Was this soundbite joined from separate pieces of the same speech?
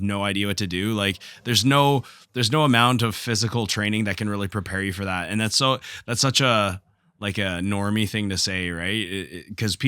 no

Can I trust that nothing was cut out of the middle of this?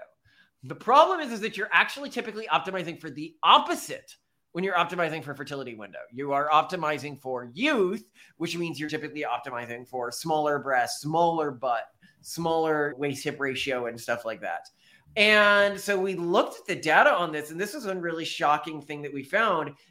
yes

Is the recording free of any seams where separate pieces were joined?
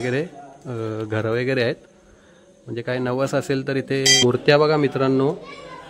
no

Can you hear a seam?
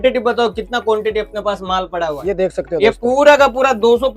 no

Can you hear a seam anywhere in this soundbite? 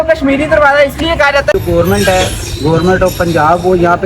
yes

